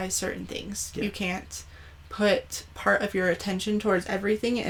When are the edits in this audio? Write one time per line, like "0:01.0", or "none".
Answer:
none